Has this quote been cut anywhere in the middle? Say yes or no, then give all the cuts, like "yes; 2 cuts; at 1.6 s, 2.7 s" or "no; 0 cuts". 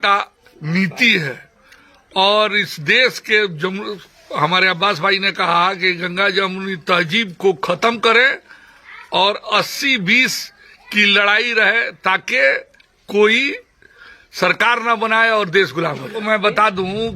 yes; 1 cut; at 16.2 s